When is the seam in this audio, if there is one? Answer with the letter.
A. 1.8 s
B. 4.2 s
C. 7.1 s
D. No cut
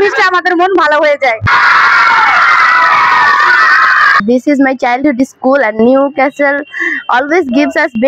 B